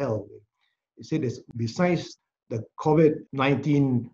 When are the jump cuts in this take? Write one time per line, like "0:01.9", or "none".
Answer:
0:01.4
0:02.1
0:03.3